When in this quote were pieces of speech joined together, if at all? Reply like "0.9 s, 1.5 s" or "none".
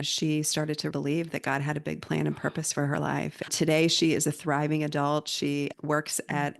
0.9 s